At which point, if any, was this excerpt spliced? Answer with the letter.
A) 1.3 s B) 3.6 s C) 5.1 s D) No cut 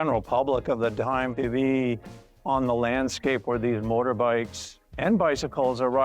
A